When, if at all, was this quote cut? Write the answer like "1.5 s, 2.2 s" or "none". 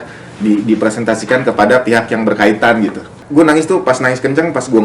3.2 s